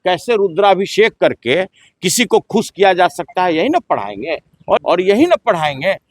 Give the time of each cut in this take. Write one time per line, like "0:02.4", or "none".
0:04.8